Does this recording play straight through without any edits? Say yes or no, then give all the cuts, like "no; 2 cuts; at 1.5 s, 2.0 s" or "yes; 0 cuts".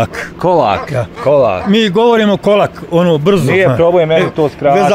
yes; 0 cuts